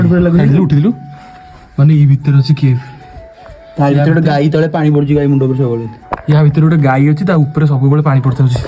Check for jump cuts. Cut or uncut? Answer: uncut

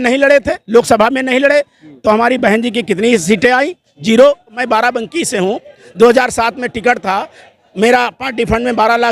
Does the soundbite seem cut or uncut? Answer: cut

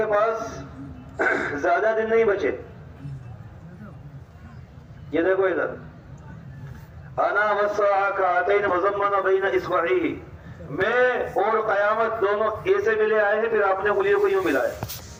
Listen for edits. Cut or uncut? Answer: uncut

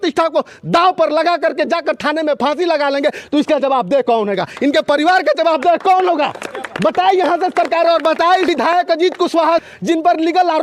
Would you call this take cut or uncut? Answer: uncut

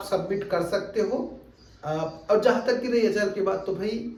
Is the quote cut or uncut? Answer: uncut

